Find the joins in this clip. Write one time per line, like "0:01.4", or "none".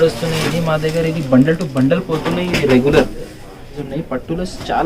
0:03.8